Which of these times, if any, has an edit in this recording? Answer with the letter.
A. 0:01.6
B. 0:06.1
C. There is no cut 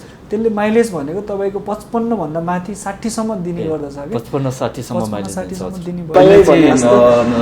B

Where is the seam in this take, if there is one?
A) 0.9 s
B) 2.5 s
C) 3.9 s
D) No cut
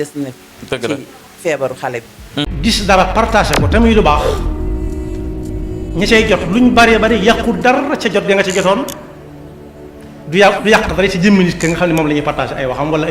B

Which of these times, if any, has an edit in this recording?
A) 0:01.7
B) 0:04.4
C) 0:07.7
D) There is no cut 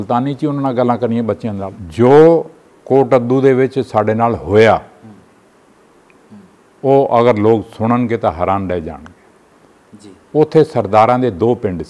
A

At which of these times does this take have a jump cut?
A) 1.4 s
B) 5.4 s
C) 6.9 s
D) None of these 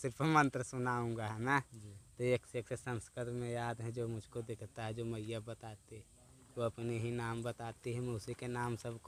D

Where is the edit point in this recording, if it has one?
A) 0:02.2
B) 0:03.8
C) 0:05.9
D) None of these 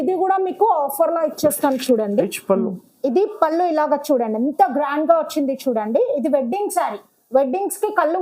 A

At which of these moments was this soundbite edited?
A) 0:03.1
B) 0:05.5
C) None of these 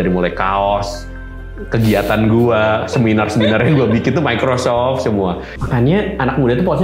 B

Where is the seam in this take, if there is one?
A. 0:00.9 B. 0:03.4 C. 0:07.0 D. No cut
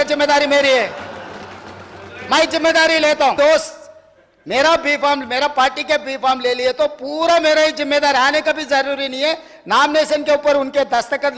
B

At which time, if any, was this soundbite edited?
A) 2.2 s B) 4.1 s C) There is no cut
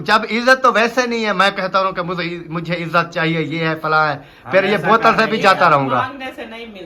C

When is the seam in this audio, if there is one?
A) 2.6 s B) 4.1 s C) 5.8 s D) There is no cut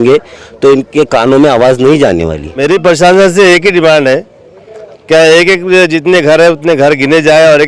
A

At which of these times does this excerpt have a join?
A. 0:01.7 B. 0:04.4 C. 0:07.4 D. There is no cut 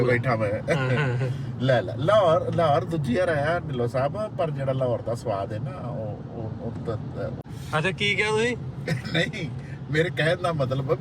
C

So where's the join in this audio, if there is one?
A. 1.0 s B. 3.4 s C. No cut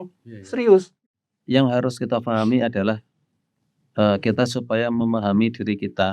A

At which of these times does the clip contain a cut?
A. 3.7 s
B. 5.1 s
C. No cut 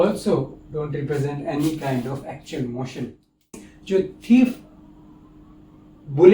A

